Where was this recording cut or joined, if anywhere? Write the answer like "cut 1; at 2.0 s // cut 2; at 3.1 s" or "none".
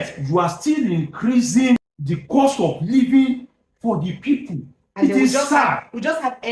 cut 1; at 1.8 s